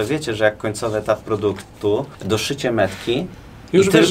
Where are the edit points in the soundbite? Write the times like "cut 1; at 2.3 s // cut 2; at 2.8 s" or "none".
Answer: none